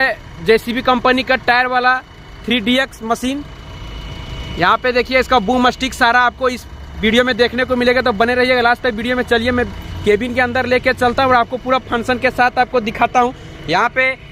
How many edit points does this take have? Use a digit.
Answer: 0